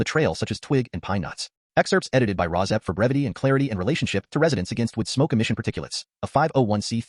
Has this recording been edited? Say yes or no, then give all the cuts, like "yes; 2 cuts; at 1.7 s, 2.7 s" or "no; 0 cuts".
no; 0 cuts